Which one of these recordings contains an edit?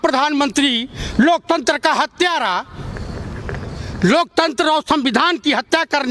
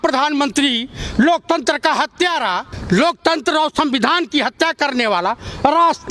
second; 1 cut; at 2.7 s

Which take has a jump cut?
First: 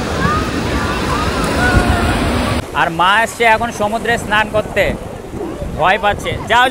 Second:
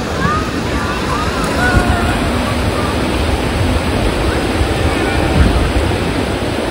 first; 1 cut; at 2.7 s

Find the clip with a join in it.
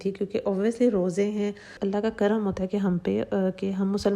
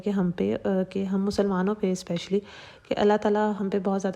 first; 1 cut; at 1.7 s

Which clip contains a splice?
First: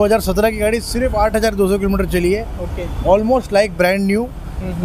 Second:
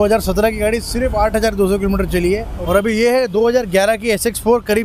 second; 1 cut; at 2.5 s

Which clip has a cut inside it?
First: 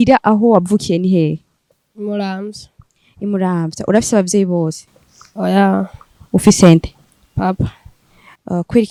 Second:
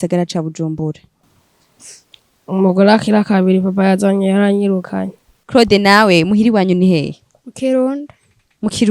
second; 1 cut; at 5.3 s

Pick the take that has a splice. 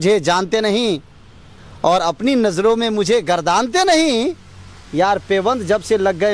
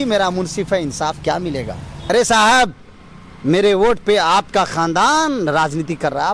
second; 1 cut; at 2.1 s

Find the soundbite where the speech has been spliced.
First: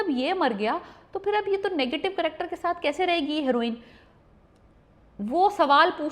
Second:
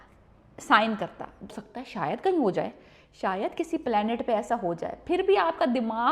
second; 1 cut; at 1.5 s

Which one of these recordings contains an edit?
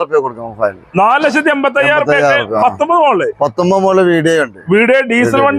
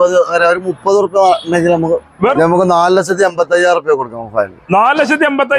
second; 1 cut; at 2.3 s

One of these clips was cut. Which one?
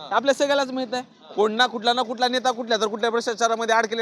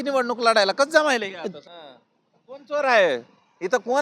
second; 1 cut; at 1.5 s

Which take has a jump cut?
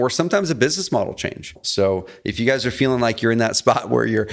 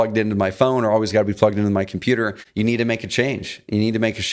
first; 1 cut; at 1.6 s

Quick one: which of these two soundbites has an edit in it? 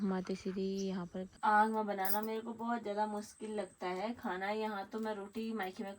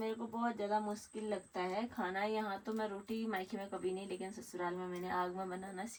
first; 1 cut; at 1.3 s

